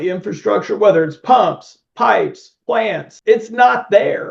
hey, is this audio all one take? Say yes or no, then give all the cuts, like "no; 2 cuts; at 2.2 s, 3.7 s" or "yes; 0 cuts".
no; 1 cut; at 3.1 s